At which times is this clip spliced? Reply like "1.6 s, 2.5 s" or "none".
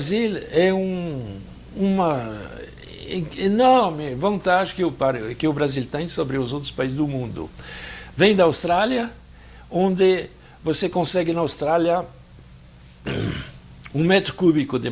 none